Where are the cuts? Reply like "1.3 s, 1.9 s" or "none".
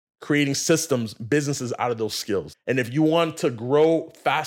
2.5 s